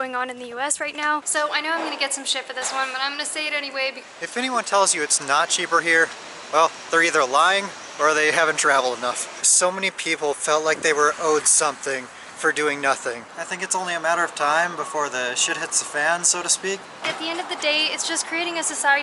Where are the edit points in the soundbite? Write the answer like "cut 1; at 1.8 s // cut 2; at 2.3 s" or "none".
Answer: cut 1; at 1.3 s // cut 2; at 4.0 s // cut 3; at 9.3 s // cut 4; at 13.3 s // cut 5; at 17.0 s